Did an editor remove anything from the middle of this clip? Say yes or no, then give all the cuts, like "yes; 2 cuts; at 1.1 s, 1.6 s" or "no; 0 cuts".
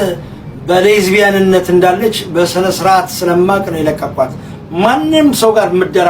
no; 0 cuts